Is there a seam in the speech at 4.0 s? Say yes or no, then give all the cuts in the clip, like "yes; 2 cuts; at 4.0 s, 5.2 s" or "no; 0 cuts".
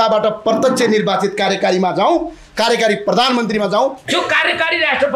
yes; 1 cut; at 4.0 s